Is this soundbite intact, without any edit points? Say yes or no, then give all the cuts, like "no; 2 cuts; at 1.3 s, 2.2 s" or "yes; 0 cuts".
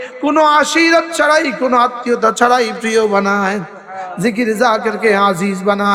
yes; 0 cuts